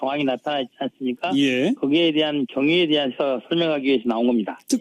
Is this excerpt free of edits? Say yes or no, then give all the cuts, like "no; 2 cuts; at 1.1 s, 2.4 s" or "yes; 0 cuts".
no; 1 cut; at 2.4 s